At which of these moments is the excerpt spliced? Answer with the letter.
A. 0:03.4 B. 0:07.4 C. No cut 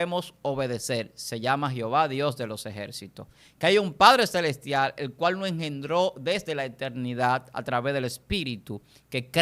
C